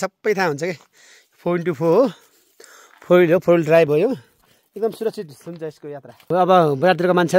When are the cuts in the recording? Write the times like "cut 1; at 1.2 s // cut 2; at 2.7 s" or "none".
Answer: cut 1; at 6.3 s